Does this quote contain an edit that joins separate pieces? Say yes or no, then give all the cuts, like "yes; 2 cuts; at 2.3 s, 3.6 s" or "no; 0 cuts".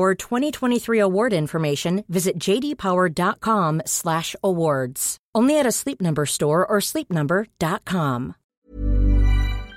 yes; 1 cut; at 8.4 s